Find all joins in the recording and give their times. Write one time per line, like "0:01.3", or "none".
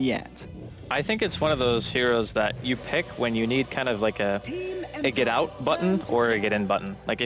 0:05.1